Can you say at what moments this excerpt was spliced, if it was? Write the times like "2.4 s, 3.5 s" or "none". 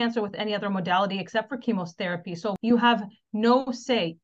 2.6 s